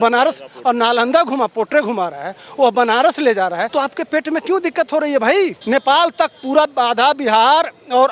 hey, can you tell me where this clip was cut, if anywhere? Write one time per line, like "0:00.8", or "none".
0:03.7
0:05.6